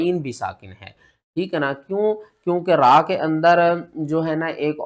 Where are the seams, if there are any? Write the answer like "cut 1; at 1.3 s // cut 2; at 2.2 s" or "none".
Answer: none